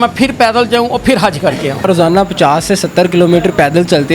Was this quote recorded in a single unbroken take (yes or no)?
no